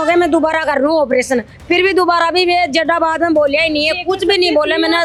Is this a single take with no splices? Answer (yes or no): yes